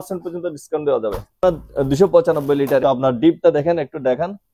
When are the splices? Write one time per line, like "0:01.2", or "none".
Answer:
0:01.4
0:02.8